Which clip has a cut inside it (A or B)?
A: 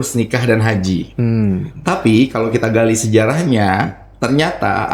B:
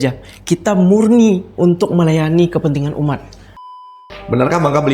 B